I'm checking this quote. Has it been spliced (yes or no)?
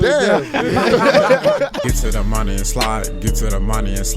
yes